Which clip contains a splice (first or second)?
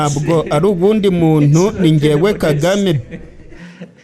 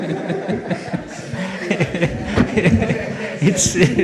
first